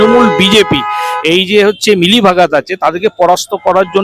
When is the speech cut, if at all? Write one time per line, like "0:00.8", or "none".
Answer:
none